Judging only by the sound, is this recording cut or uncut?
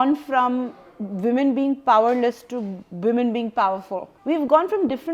cut